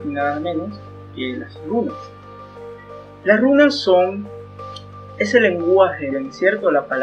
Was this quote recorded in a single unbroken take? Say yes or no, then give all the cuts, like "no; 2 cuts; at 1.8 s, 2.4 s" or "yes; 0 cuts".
yes; 0 cuts